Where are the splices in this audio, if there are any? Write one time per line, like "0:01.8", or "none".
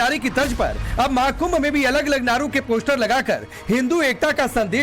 0:02.8